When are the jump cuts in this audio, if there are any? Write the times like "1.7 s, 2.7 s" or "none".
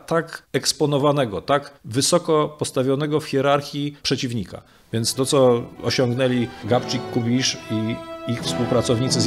none